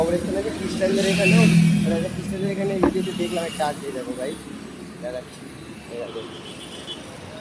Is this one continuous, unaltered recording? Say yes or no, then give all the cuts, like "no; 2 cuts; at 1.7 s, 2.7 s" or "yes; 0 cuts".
yes; 0 cuts